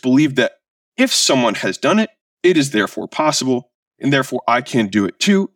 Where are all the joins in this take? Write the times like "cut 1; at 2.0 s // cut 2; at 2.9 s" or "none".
none